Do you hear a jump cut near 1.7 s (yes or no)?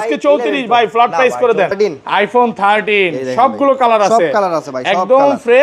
yes